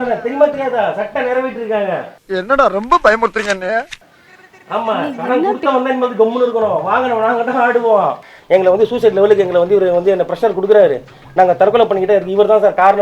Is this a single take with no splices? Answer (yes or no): no